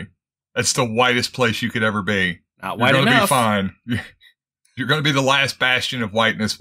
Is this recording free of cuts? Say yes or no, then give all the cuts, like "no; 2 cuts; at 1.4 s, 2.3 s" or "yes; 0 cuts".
yes; 0 cuts